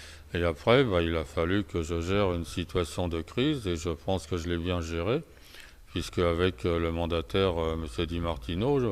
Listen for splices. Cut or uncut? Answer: cut